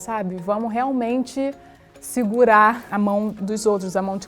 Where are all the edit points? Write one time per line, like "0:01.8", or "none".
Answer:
0:02.8